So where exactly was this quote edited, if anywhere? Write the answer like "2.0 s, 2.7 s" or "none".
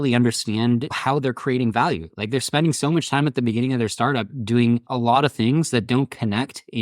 0.9 s, 4.9 s